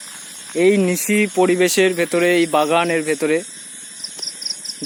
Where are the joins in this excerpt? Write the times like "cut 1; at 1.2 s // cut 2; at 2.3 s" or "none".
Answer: none